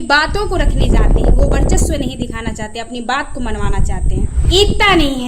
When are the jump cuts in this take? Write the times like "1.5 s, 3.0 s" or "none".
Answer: 4.4 s